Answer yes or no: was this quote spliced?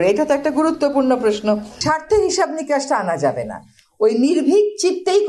yes